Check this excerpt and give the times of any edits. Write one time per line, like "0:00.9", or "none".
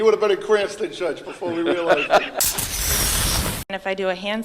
0:02.3
0:03.7